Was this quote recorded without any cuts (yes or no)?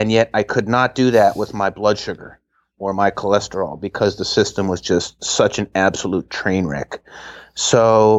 yes